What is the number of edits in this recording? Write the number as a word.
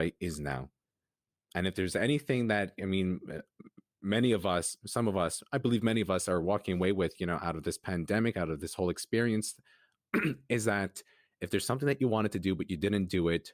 one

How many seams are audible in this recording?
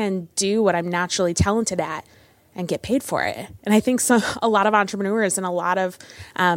one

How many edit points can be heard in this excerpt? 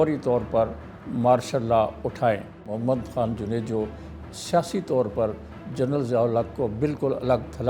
one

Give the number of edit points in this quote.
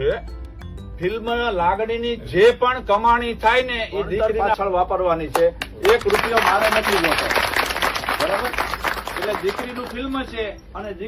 one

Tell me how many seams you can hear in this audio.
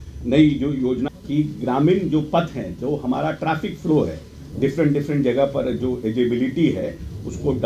two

